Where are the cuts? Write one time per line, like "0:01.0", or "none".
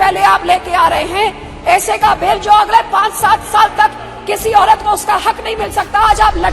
none